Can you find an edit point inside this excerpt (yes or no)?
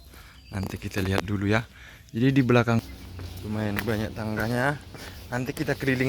yes